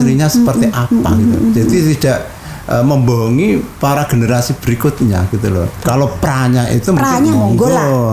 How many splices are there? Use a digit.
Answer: 1